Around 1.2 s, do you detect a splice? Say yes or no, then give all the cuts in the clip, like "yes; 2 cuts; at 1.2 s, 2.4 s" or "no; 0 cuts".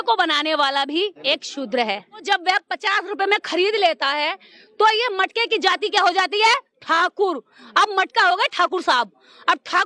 yes; 2 cuts; at 1.2 s, 2.2 s